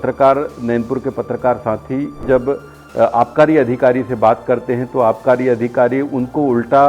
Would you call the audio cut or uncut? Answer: cut